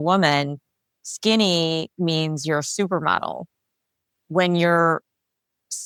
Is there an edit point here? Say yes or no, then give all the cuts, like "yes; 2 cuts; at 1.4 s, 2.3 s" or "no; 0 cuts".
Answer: no; 0 cuts